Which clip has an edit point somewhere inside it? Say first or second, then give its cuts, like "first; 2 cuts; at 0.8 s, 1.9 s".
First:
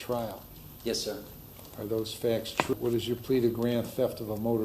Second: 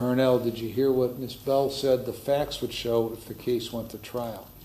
first; 1 cut; at 2.7 s